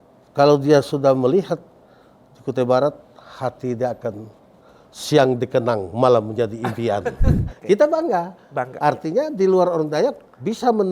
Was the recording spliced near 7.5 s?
yes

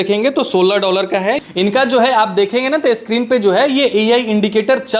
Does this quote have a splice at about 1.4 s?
yes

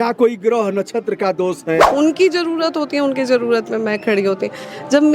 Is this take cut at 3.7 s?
no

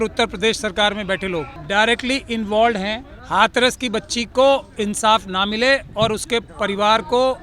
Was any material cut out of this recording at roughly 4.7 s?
no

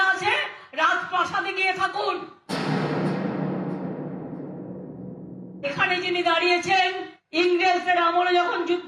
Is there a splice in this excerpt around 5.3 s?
yes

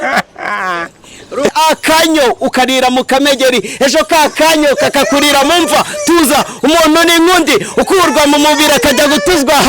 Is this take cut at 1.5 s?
yes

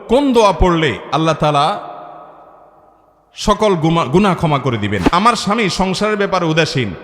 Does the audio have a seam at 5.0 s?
yes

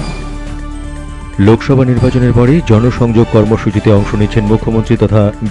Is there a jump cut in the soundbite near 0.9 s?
yes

